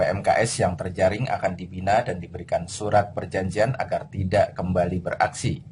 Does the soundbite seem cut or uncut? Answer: uncut